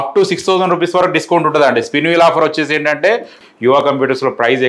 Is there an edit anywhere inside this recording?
yes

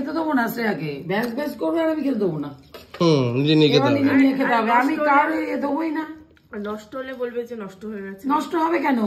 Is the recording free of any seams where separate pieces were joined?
yes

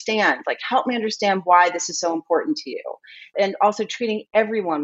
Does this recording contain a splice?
yes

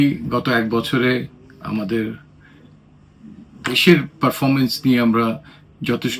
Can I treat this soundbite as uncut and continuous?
yes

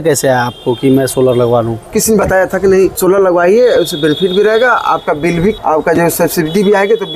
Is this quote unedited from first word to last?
no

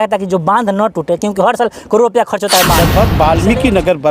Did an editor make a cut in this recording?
yes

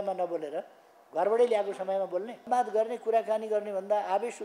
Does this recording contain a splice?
yes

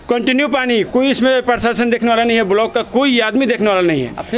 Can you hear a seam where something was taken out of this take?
no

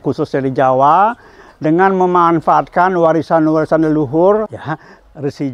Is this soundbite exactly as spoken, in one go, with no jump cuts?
no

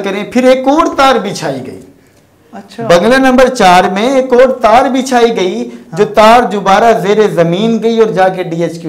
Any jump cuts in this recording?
no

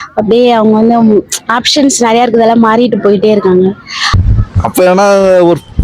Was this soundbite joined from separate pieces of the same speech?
yes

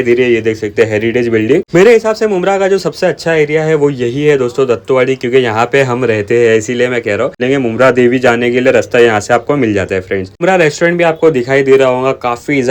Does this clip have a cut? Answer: yes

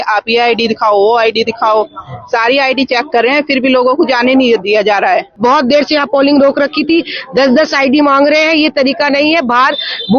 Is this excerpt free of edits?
no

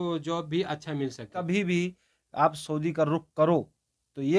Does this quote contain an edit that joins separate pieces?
yes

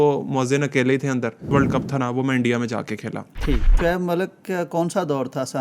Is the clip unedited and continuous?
no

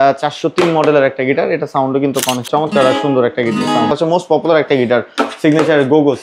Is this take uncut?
no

